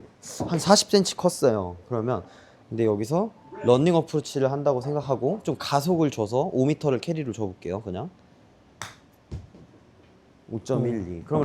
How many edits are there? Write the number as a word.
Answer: one